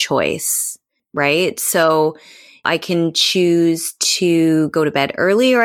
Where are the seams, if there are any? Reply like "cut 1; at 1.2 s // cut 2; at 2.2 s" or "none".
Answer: cut 1; at 1.0 s // cut 2; at 2.7 s